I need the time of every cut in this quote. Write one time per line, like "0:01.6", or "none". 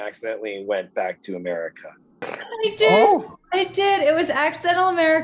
0:02.3